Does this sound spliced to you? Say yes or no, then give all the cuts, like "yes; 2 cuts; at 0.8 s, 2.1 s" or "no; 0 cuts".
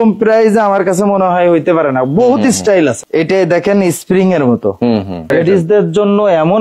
yes; 2 cuts; at 3.0 s, 5.3 s